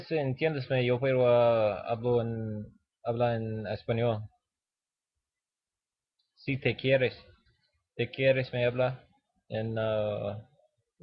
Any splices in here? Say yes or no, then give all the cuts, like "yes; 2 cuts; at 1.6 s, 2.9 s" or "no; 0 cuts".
no; 0 cuts